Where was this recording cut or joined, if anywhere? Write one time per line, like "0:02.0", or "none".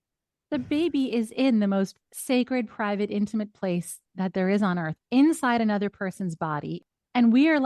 0:02.1
0:06.7